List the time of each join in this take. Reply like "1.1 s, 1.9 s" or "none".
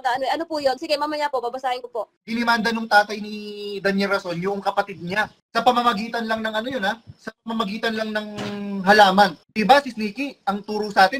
2.2 s, 5.4 s, 9.4 s